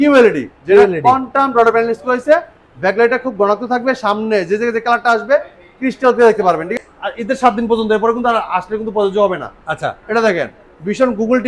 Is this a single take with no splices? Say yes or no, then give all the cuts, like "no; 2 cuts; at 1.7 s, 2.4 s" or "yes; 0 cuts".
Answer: no; 1 cut; at 6.7 s